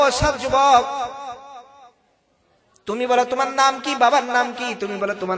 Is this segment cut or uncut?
uncut